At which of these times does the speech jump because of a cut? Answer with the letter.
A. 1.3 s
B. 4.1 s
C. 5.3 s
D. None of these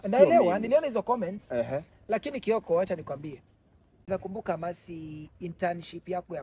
B